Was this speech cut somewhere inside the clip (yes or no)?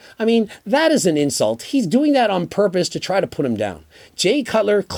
no